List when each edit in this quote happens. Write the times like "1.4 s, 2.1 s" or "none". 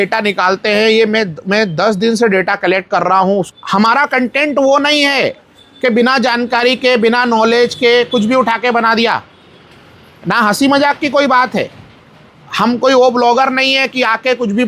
3.5 s